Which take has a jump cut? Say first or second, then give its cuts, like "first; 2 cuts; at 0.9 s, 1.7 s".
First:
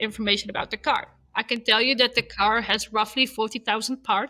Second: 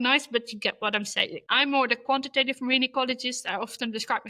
second; 1 cut; at 1.4 s